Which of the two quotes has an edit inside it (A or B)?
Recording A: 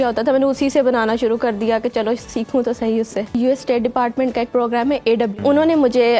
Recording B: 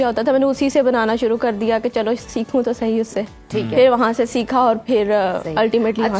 A